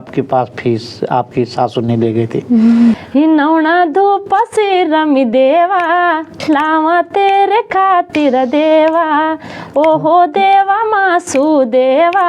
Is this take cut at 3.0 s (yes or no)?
yes